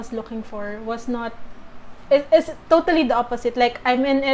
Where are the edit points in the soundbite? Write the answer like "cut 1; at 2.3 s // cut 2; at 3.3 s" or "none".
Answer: none